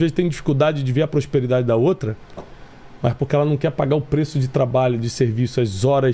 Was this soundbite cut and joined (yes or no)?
no